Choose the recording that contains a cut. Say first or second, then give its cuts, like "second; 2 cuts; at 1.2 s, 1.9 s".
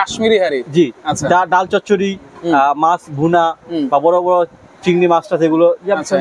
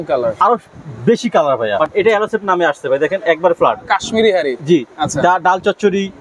second; 1 cut; at 1.8 s